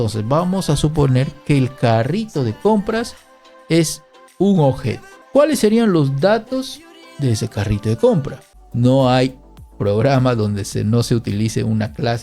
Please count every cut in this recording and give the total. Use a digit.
1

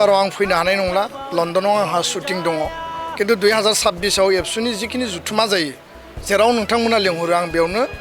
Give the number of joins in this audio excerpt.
0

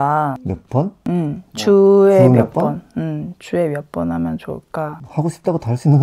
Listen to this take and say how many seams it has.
1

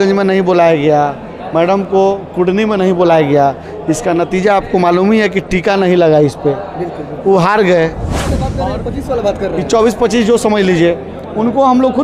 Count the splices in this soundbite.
1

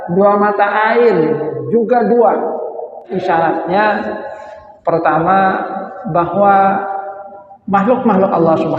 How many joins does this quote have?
1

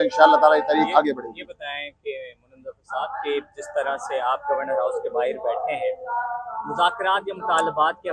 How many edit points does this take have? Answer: 0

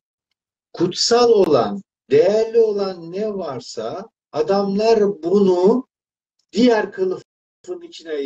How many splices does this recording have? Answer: 1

